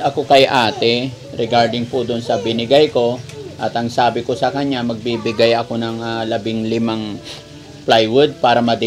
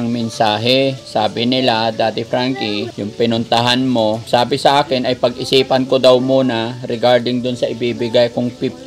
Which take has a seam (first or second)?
second